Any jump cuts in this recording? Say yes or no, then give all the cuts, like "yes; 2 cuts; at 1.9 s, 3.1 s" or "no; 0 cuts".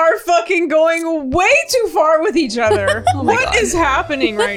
no; 0 cuts